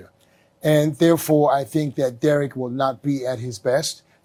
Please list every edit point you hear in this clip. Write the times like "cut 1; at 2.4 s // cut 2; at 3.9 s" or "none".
none